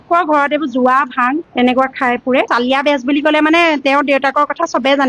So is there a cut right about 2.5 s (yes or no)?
yes